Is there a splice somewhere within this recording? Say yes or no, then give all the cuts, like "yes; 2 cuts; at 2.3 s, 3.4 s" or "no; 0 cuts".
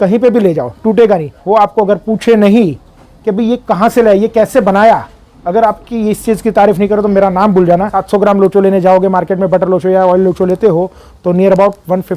yes; 2 cuts; at 1.3 s, 8.0 s